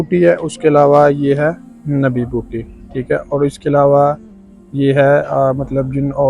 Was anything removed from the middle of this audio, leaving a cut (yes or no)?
no